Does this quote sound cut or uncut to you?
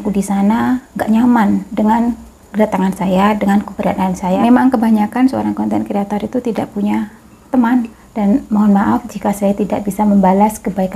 cut